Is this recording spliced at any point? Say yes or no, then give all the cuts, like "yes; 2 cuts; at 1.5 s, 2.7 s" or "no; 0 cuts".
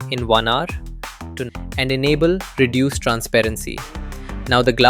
yes; 1 cut; at 1.4 s